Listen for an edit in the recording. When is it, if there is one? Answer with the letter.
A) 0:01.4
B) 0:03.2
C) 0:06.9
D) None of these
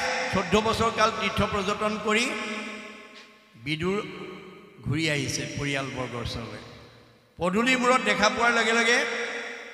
D